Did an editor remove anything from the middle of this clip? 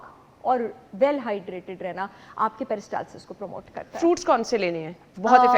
no; 0 cuts

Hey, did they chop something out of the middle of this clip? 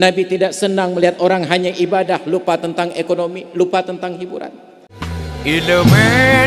yes; 1 cut; at 5.1 s

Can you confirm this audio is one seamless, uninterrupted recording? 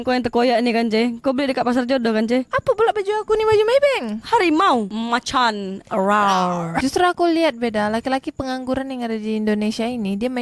no; 2 cuts; at 4.9 s, 6.7 s

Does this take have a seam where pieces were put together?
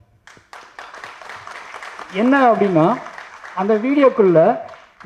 no; 0 cuts

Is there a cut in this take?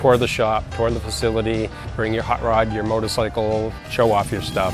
yes; 2 cuts; at 1.9 s, 3.8 s

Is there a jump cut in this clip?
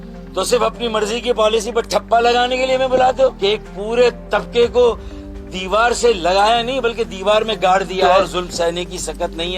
yes; 2 cuts; at 3.4 s, 8.3 s

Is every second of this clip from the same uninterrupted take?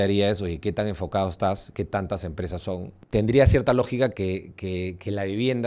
no; 1 cut; at 2.9 s

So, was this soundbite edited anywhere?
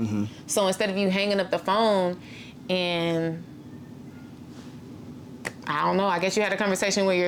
no; 0 cuts

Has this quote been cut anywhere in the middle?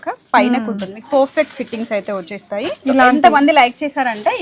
yes; 1 cut; at 2.8 s

